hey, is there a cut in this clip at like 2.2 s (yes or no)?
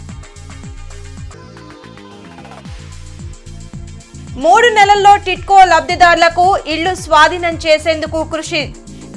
no